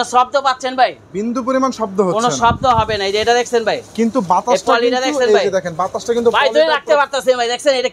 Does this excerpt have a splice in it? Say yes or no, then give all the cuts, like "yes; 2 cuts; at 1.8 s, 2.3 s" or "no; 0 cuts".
no; 0 cuts